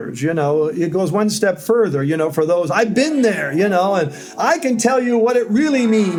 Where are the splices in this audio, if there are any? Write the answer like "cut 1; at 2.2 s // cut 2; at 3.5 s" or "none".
none